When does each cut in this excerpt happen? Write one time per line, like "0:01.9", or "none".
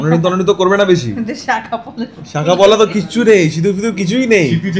none